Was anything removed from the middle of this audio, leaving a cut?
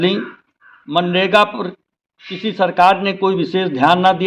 no; 0 cuts

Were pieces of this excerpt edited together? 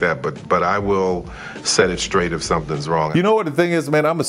yes; 1 cut; at 3.1 s

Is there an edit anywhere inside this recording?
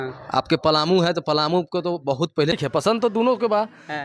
yes; 1 cut; at 2.5 s

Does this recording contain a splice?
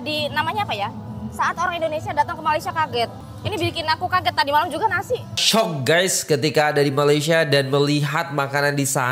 yes; 2 cuts; at 3.3 s, 5.4 s

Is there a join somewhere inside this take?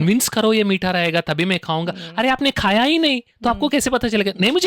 no; 0 cuts

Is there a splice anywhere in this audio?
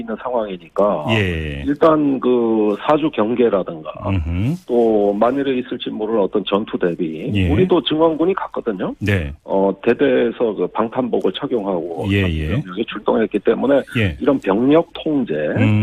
no; 0 cuts

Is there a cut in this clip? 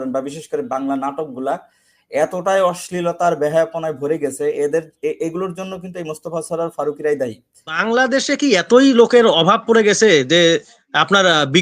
yes; 1 cut; at 7.8 s

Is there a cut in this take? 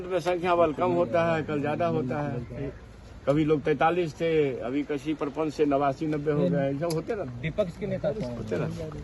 no; 0 cuts

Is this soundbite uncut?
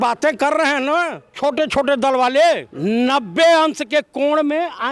no; 2 cuts; at 1.2 s, 2.7 s

